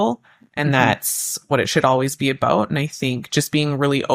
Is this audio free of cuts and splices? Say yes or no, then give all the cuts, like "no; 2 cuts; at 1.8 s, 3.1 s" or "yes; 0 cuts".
yes; 0 cuts